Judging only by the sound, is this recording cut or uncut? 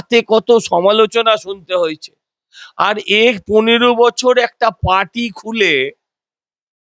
uncut